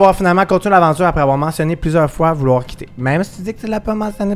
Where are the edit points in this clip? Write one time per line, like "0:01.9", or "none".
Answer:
none